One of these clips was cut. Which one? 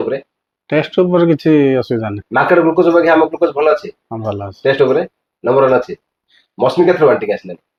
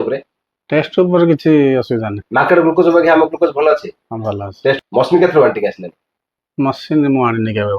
second; 1 cut; at 4.8 s

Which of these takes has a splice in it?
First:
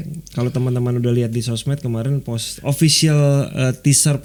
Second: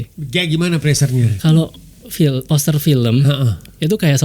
second; 1 cut; at 1.3 s

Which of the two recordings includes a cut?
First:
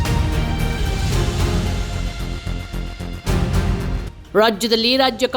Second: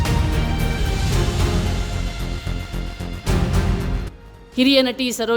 second; 1 cut; at 4.0 s

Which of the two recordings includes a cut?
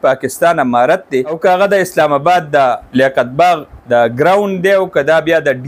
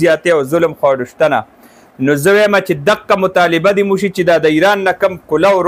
first; 3 cuts; at 1.4 s, 2.8 s, 3.7 s

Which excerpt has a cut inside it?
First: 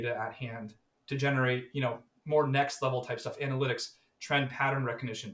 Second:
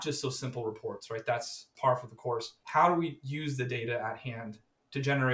second; 2 cuts; at 1.7 s, 2.6 s

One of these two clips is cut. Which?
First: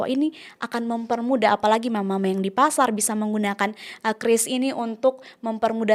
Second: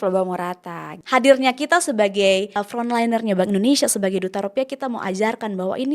second; 2 cuts; at 0.9 s, 2.6 s

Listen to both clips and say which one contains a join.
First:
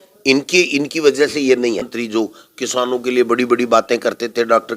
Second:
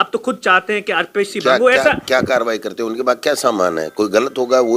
first; 1 cut; at 1.9 s

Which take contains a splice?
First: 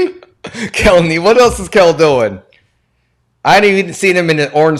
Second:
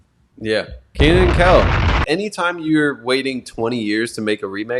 second; 1 cut; at 2.0 s

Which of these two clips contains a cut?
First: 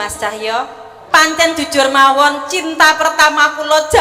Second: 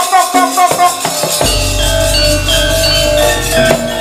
first; 1 cut; at 0.9 s

